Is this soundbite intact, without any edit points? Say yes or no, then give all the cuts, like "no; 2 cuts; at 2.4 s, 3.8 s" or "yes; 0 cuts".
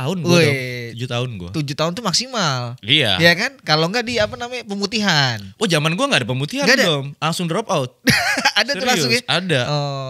yes; 0 cuts